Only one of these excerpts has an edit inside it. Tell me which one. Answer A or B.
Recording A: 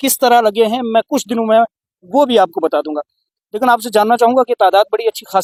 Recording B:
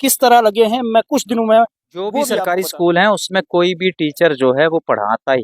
B